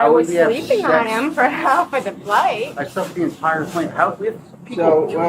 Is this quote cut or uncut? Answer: uncut